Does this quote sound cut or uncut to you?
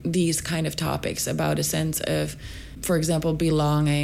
cut